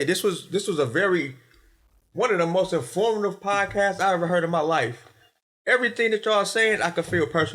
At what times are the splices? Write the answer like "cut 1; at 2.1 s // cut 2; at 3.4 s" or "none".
none